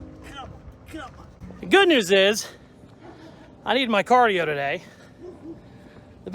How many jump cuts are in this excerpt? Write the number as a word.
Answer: one